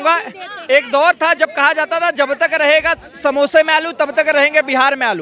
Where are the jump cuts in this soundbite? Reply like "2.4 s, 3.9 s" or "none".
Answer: none